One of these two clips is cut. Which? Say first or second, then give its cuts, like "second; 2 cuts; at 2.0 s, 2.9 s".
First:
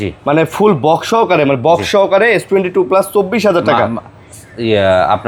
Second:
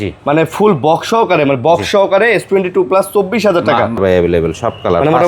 second; 1 cut; at 4.0 s